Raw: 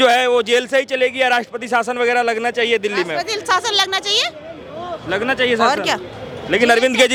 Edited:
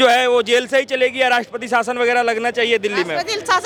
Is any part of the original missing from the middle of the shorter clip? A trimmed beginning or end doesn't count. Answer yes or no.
no